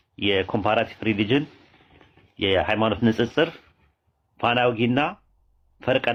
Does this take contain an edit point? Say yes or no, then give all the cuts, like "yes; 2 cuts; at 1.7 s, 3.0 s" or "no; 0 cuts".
no; 0 cuts